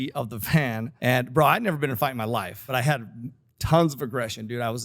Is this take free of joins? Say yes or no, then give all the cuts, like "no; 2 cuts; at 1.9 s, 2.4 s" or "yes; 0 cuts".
no; 2 cuts; at 0.9 s, 2.6 s